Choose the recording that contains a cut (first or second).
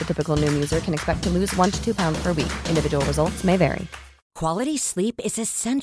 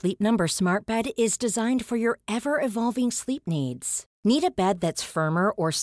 first